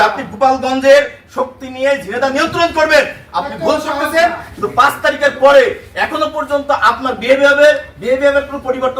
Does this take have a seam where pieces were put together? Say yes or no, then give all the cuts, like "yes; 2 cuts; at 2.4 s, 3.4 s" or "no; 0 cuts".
no; 0 cuts